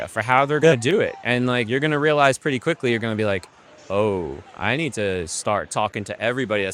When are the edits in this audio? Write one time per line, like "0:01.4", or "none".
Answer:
none